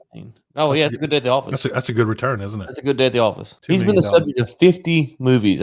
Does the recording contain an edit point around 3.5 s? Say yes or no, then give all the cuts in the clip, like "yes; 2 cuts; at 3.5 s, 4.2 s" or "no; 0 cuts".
yes; 1 cut; at 3.5 s